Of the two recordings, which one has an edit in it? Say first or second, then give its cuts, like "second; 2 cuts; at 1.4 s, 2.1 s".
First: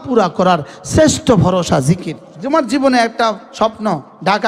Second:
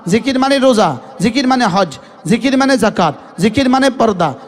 first; 1 cut; at 2.2 s